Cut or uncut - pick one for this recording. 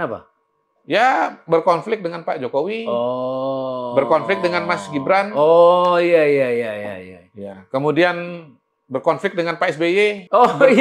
uncut